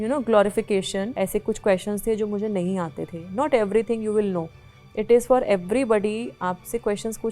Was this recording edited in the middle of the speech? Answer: yes; 1 cut; at 1.1 s

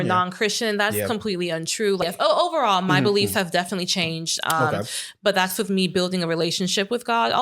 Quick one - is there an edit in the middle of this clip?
yes; 1 cut; at 2.0 s

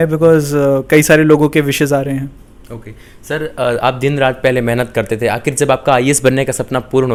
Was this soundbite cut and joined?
no; 0 cuts

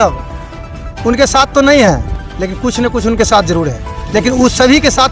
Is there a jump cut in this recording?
no; 0 cuts

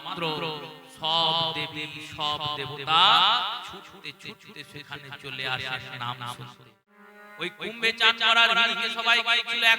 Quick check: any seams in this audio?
yes; 1 cut; at 7.0 s

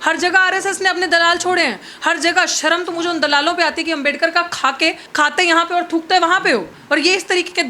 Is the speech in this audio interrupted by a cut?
yes; 1 cut; at 6.7 s

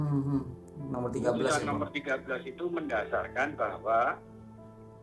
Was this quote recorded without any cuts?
yes; 0 cuts

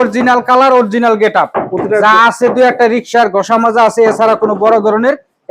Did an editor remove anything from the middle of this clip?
no; 0 cuts

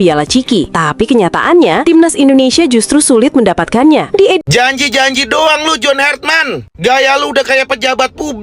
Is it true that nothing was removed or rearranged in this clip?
no; 1 cut; at 4.4 s

